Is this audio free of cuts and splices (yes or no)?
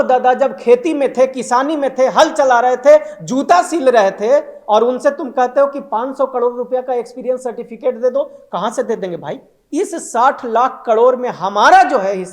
no